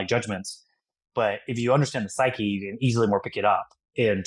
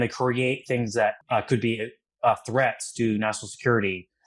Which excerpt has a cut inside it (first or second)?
second